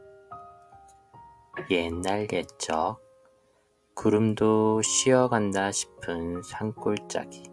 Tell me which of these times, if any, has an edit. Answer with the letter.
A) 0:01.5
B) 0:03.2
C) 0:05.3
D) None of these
A